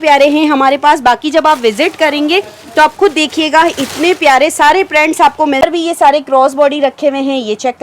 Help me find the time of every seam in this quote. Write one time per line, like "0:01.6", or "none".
0:05.6